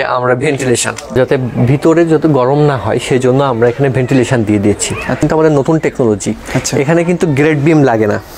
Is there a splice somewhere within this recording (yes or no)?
yes